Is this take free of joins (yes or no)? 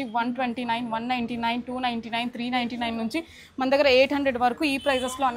yes